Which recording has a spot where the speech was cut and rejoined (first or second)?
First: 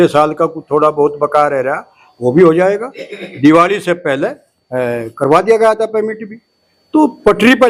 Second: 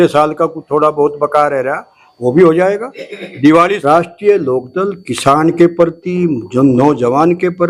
second